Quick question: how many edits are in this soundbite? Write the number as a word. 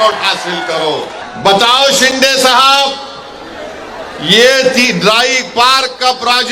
one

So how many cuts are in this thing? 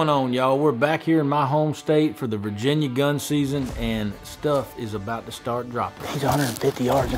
one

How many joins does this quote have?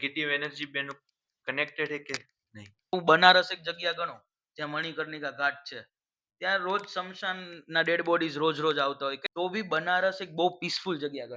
two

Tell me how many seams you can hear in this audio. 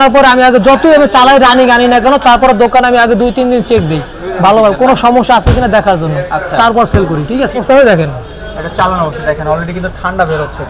one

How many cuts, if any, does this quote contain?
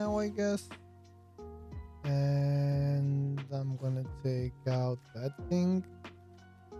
one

